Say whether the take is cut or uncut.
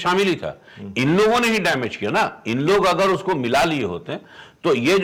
uncut